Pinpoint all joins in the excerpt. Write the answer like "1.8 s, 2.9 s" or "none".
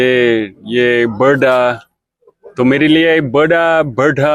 none